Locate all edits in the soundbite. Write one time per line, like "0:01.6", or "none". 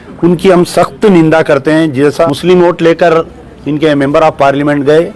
0:02.3